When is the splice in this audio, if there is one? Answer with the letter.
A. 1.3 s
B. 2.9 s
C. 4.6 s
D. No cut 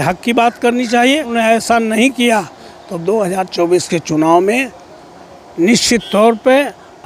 A